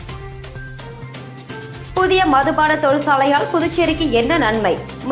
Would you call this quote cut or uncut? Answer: cut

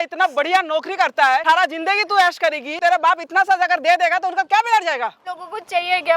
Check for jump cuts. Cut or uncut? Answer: cut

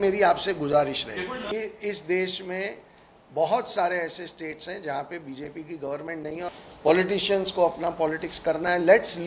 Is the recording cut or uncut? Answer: cut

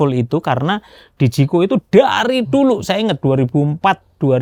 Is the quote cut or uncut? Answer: uncut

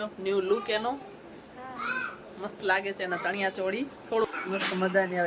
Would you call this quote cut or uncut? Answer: cut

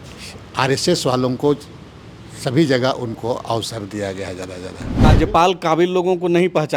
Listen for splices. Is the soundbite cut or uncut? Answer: cut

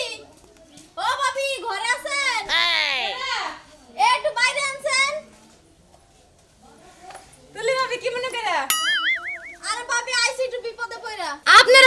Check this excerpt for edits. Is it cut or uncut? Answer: uncut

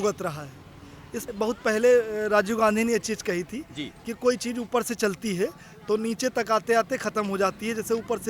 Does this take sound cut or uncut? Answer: cut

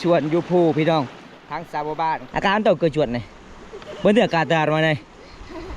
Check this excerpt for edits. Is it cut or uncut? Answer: cut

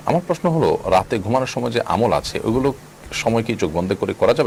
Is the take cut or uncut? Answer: uncut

